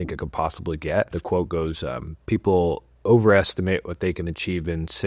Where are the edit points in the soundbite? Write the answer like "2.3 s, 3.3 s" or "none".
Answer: 1.1 s